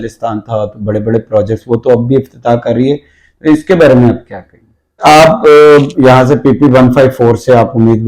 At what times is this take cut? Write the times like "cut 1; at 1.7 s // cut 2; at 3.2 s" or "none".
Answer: cut 1; at 5.0 s